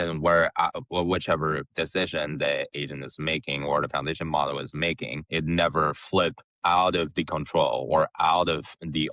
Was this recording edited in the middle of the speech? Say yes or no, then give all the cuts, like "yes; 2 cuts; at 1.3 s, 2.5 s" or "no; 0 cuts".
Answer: no; 0 cuts